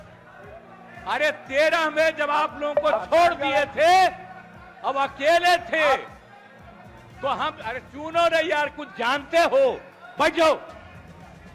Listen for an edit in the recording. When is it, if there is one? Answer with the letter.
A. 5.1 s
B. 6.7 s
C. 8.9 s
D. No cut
D